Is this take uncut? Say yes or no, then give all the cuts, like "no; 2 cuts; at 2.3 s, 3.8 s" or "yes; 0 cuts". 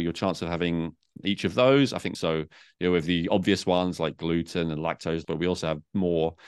no; 3 cuts; at 1.1 s, 2.1 s, 5.2 s